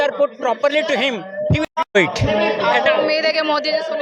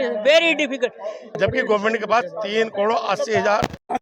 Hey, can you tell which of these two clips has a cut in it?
second; 1 cut; at 1.4 s

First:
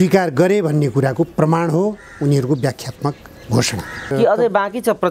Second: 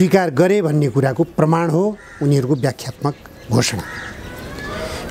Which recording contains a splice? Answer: first; 1 cut; at 4.1 s

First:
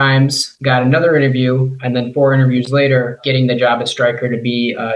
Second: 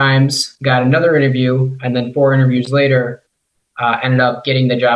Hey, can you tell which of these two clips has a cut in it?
first; 1 cut; at 3.2 s

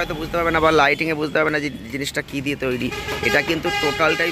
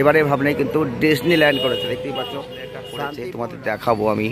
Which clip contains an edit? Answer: second; 1 cut; at 2.9 s

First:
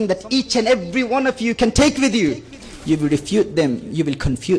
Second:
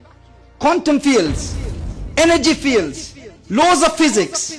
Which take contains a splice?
first; 1 cut; at 2.6 s

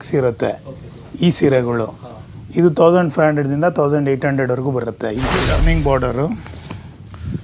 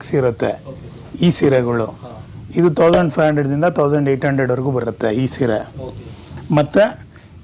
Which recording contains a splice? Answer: first; 1 cut; at 5.4 s

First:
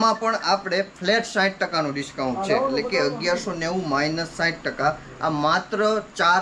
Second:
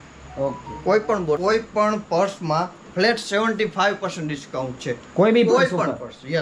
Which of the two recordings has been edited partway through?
second; 1 cut; at 1.4 s

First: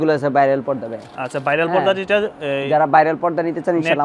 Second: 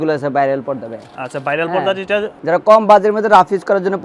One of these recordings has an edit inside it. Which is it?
second; 1 cut; at 2.3 s

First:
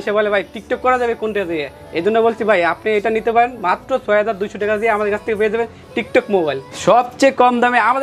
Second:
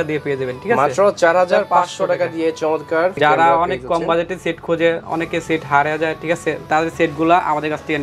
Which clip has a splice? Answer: second; 2 cuts; at 3.1 s, 6.7 s

